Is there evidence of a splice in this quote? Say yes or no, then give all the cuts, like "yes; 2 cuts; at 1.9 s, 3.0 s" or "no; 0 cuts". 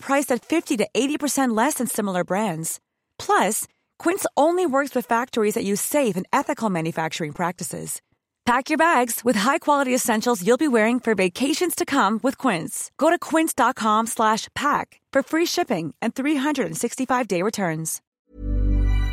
yes; 1 cut; at 18.2 s